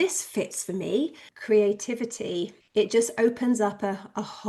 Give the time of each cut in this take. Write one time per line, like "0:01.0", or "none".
0:01.3
0:02.6